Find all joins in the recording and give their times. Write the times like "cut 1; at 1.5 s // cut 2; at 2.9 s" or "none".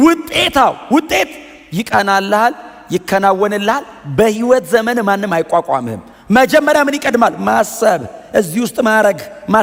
none